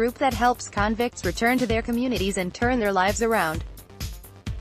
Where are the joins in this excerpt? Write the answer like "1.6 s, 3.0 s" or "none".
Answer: 3.7 s